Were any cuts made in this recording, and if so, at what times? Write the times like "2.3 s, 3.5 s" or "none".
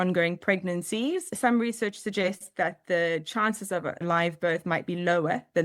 1.3 s, 4.0 s